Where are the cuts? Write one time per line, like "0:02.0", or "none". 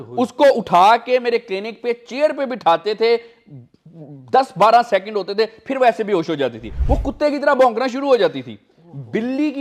0:06.8